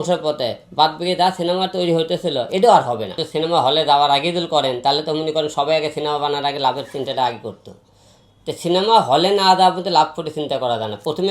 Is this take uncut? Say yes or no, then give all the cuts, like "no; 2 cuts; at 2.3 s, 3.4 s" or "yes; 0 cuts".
yes; 0 cuts